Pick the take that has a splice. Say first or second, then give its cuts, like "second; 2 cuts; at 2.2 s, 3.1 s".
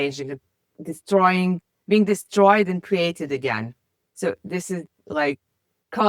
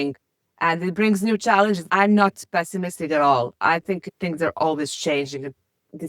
second; 2 cuts; at 1.9 s, 4.1 s